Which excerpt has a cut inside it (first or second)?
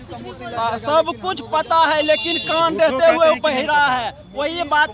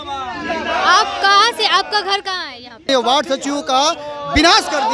second